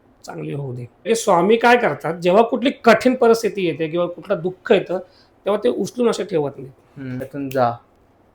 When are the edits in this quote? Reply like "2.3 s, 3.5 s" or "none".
1.1 s, 7.2 s